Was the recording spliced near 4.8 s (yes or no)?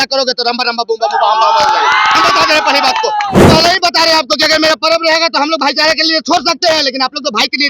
no